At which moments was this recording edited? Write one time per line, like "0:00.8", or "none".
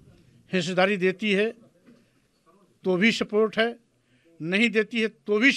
none